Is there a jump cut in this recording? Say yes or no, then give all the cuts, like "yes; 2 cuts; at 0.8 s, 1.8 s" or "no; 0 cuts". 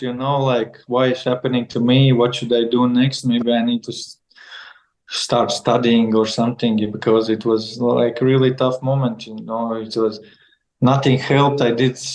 no; 0 cuts